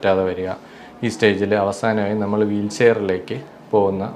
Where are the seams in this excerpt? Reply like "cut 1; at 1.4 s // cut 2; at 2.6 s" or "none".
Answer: none